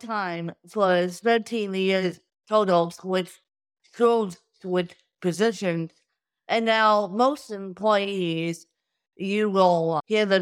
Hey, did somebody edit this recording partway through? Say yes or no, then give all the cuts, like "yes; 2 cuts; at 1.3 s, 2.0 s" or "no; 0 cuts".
no; 0 cuts